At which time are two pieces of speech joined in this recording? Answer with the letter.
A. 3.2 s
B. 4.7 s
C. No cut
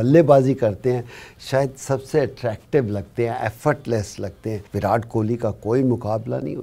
B